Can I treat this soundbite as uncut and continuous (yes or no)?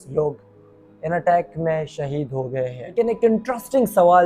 no